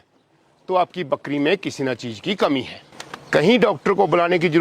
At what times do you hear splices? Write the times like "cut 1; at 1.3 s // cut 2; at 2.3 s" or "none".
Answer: none